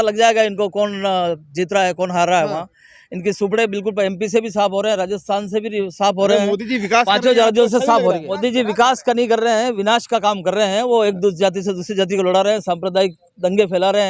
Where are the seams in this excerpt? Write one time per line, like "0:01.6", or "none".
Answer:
0:08.3